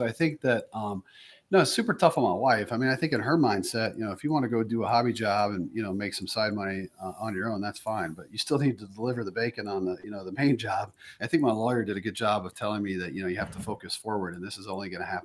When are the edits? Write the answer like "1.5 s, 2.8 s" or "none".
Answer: 10.9 s